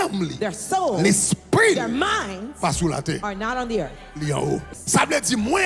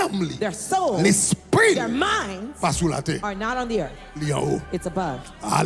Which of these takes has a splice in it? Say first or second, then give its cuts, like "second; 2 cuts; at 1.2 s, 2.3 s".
first; 1 cut; at 4.7 s